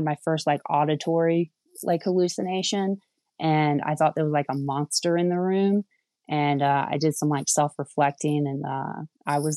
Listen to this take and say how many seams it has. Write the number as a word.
zero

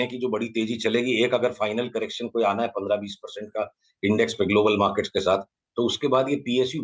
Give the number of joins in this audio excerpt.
zero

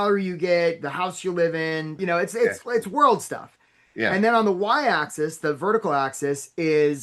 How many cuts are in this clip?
one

